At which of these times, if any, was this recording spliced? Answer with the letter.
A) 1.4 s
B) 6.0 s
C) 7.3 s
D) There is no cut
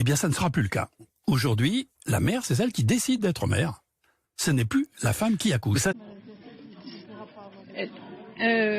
B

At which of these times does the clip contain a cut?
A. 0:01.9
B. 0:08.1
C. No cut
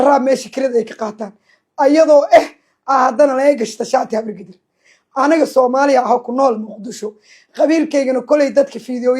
C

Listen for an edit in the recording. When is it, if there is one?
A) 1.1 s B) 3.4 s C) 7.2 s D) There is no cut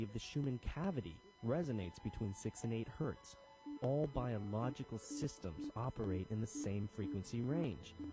C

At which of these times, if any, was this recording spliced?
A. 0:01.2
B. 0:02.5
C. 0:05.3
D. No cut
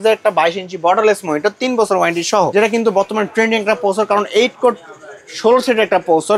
B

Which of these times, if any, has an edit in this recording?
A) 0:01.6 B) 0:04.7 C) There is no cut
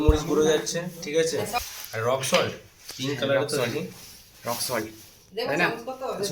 A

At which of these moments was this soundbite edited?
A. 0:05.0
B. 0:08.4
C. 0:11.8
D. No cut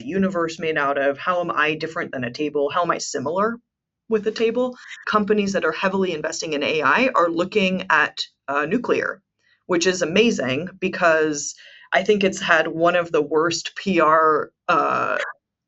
A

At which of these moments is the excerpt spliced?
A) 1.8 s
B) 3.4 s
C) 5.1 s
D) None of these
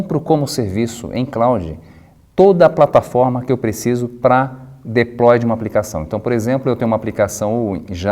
B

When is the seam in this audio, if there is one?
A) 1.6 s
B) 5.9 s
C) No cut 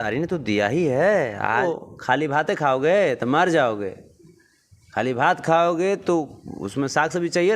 A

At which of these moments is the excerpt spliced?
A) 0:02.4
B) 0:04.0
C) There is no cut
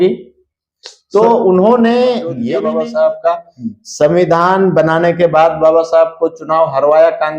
A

